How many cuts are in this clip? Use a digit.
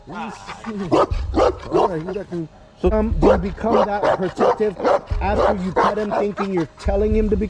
1